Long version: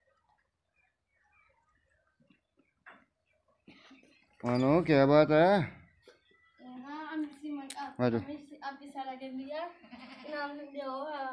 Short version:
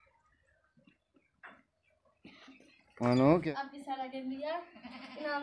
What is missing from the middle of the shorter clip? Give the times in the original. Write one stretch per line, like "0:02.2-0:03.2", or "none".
0:04.8-0:08.5